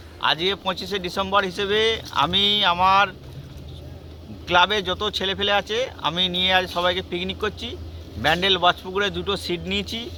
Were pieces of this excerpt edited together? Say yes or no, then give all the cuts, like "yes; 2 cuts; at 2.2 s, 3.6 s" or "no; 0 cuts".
no; 0 cuts